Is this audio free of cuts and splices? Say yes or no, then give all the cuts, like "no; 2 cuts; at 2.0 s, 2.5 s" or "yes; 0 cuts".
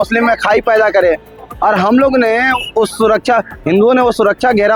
yes; 0 cuts